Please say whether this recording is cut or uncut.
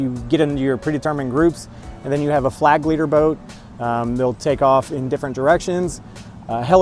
uncut